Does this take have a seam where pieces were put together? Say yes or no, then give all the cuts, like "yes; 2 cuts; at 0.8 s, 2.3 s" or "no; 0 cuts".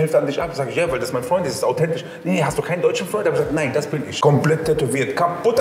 yes; 1 cut; at 4.2 s